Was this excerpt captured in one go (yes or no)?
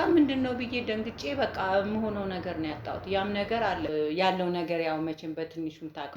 no